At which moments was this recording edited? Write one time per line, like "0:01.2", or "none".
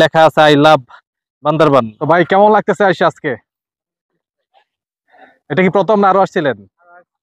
0:01.9